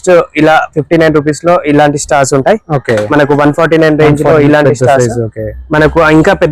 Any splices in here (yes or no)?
no